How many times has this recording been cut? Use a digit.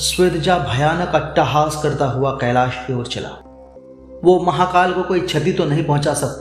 1